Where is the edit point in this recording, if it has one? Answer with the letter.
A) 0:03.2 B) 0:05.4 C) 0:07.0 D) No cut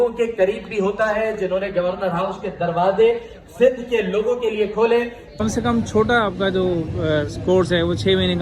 B